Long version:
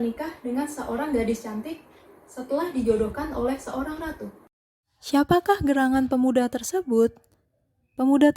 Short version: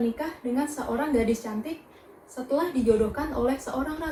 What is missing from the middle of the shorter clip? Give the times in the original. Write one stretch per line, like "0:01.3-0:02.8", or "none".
none